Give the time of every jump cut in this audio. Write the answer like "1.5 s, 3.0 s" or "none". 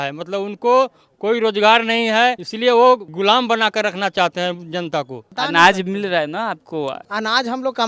2.5 s, 3.1 s, 5.2 s, 7.0 s